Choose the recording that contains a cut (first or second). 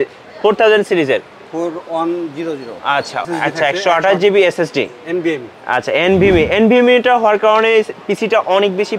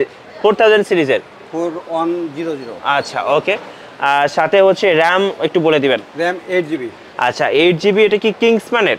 first